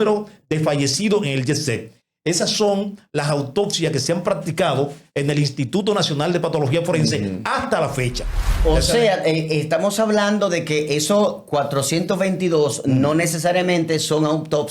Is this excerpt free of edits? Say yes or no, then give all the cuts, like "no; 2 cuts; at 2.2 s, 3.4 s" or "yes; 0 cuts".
no; 1 cut; at 8.4 s